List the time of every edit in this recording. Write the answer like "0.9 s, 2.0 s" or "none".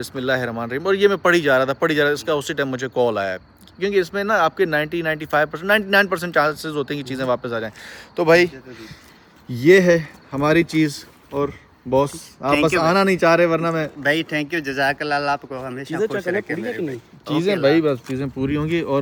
none